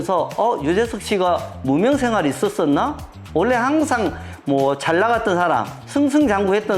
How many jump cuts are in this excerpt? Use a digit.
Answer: 0